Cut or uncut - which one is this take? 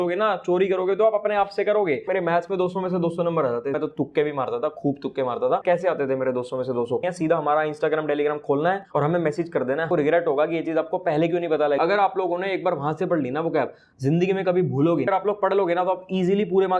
cut